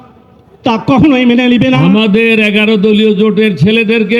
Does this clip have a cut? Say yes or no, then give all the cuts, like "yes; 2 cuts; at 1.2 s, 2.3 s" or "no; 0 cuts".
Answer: yes; 1 cut; at 1.8 s